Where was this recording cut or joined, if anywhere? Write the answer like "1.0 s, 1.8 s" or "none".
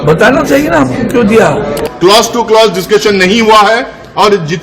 1.8 s